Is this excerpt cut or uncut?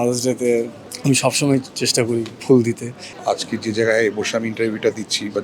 cut